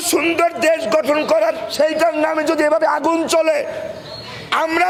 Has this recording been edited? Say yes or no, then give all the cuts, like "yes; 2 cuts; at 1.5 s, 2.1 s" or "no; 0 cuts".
no; 0 cuts